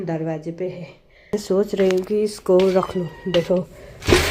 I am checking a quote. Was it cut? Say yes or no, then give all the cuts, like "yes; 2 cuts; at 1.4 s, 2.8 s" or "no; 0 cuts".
yes; 1 cut; at 1.3 s